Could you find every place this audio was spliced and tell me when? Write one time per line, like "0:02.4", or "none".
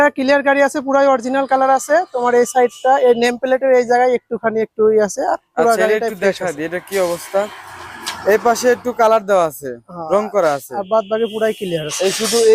none